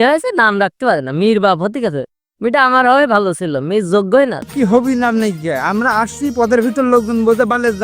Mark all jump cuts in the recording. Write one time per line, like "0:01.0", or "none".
0:04.5